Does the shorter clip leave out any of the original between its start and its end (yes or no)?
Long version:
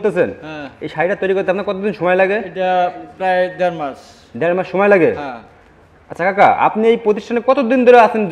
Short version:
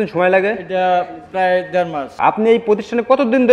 yes